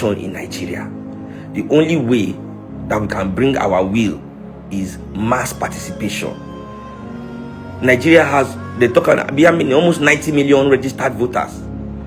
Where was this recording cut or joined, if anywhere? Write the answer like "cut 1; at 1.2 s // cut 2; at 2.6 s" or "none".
none